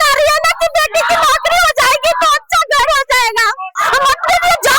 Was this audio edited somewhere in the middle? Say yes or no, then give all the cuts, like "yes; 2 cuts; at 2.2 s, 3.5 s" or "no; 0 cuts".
yes; 1 cut; at 3.8 s